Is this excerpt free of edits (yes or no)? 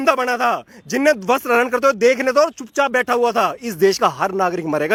yes